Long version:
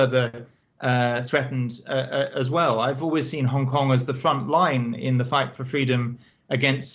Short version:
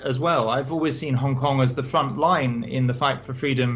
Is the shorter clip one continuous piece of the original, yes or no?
yes